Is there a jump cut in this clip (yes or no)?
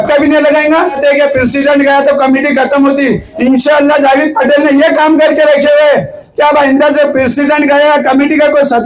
yes